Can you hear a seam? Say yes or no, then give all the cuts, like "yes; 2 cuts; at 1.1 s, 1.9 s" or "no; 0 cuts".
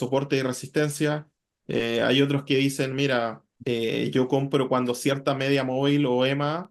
yes; 1 cut; at 3.5 s